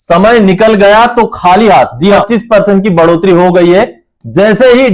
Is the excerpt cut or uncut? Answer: cut